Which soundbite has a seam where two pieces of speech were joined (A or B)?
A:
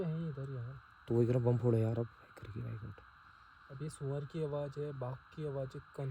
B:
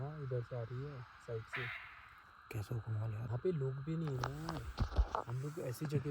B